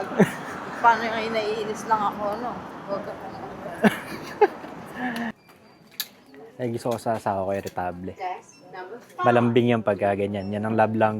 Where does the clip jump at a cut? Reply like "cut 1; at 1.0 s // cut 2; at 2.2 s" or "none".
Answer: cut 1; at 5.3 s